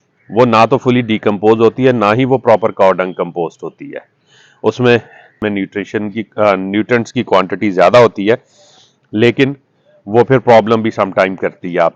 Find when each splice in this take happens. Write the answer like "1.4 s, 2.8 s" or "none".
5.4 s